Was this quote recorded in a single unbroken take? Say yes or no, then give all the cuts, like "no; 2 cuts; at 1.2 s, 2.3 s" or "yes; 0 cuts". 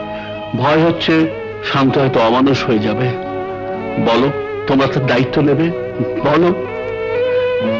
yes; 0 cuts